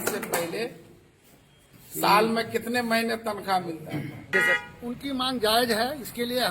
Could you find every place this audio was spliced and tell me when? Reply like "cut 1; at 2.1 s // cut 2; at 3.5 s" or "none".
cut 1; at 4.4 s